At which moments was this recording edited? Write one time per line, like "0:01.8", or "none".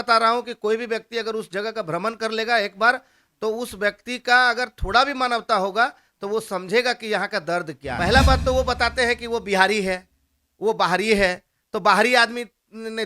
0:07.8